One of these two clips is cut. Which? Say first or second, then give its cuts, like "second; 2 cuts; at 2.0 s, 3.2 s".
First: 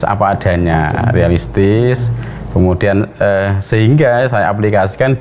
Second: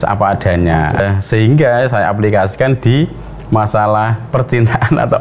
second; 2 cuts; at 1.0 s, 4.2 s